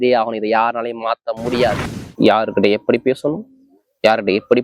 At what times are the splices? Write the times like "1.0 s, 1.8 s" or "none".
2.1 s